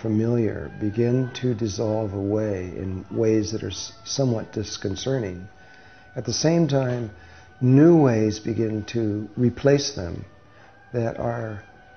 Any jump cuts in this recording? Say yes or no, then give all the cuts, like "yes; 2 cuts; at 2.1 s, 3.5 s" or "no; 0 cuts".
yes; 1 cut; at 1.4 s